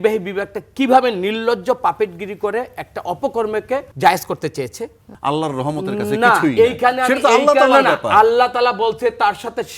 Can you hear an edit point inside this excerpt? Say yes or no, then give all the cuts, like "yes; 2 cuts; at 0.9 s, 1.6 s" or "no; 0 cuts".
yes; 2 cuts; at 3.9 s, 5.1 s